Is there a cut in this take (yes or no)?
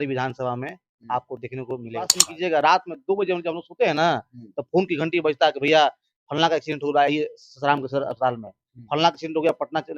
yes